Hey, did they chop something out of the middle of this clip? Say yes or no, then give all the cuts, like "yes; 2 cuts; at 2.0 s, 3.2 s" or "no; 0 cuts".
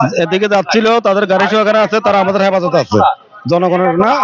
no; 0 cuts